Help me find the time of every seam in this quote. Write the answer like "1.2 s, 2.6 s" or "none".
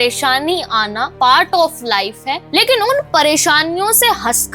1.1 s, 2.3 s